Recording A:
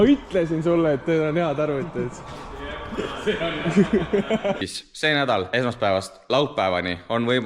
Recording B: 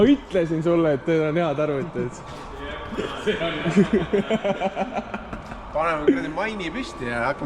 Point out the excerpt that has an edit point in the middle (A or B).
A